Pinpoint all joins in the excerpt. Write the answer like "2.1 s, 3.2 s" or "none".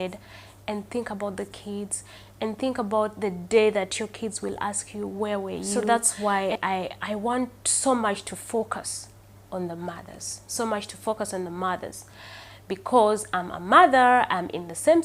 5.7 s